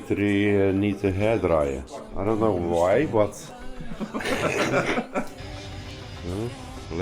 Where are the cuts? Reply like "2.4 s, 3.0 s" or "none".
5.4 s

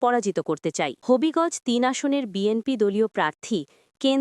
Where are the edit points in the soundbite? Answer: 1.0 s

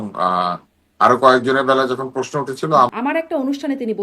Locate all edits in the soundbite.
2.9 s

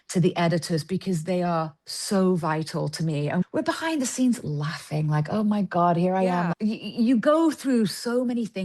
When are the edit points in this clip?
6.5 s

